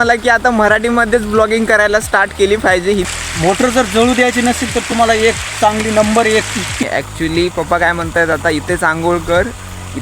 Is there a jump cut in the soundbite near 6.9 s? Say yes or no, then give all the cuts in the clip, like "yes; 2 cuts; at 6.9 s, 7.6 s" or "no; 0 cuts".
yes; 2 cuts; at 3.1 s, 6.9 s